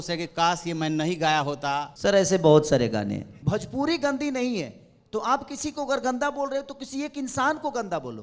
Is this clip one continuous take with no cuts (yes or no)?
no